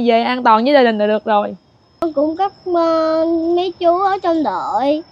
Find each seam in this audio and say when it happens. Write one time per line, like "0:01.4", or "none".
0:02.0